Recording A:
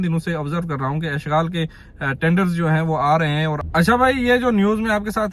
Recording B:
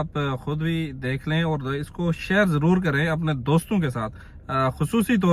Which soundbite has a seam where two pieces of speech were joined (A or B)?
A